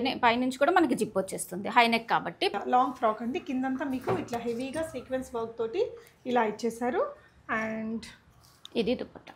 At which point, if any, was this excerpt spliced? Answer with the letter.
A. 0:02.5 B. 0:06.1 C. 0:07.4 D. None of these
A